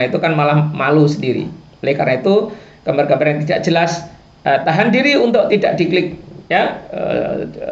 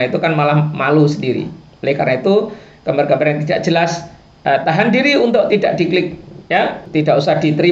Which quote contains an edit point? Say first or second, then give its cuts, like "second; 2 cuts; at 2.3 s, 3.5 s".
second; 1 cut; at 6.8 s